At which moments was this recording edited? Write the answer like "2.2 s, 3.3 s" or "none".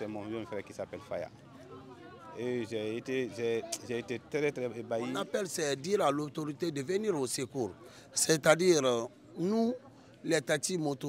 5.4 s